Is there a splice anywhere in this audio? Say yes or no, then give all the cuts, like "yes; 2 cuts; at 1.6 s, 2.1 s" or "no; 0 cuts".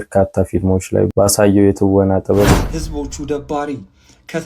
yes; 1 cut; at 2.5 s